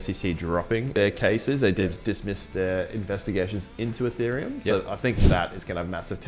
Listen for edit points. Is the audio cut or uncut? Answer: cut